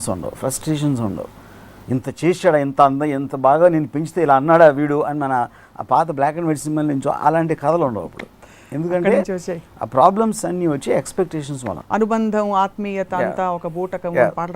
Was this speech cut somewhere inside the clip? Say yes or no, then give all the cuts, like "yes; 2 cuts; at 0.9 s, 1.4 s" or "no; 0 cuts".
no; 0 cuts